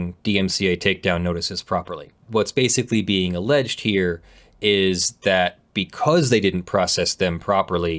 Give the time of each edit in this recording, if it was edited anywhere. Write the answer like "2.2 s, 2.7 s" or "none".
2.2 s